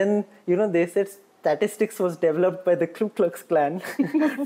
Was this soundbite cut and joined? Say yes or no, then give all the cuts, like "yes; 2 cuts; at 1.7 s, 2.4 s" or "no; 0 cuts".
no; 0 cuts